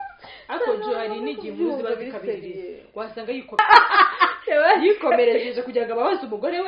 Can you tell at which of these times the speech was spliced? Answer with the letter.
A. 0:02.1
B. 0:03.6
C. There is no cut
B